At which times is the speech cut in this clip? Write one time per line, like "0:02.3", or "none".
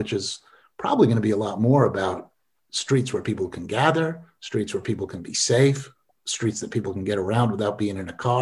none